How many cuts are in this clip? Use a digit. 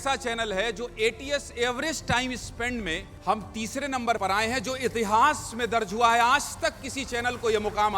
2